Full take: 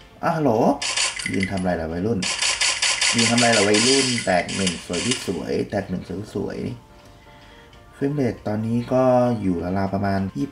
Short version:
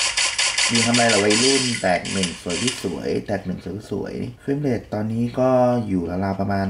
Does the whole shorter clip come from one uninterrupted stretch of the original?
no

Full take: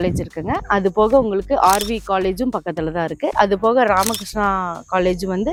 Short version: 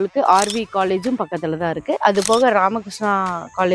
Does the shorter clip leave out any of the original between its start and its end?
no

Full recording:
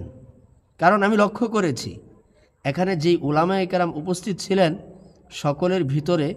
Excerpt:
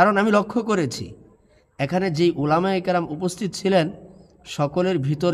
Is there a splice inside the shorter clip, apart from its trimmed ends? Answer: no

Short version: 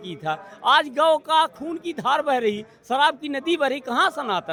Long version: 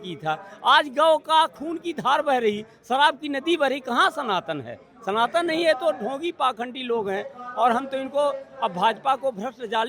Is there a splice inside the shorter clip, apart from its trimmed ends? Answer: no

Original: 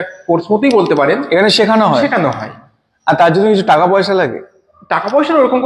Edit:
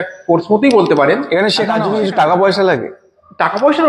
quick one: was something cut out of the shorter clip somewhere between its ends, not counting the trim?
yes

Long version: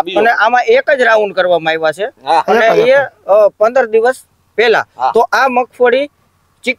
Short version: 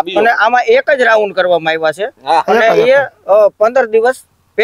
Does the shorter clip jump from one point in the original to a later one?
no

